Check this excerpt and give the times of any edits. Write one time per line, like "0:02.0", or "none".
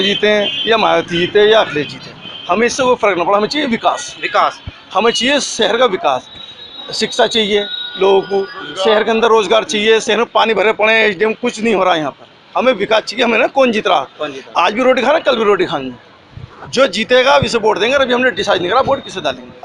none

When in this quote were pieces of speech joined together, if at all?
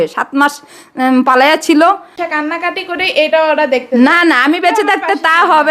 0:02.1

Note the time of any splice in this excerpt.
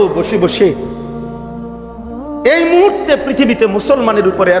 none

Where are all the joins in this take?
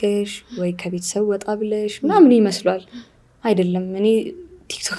none

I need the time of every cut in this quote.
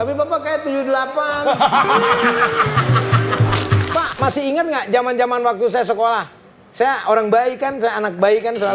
0:03.8

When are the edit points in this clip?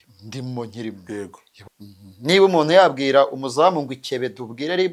0:01.5

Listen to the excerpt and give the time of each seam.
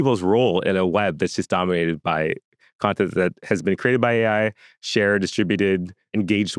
none

